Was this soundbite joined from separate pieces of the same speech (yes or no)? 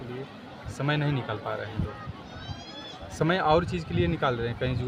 no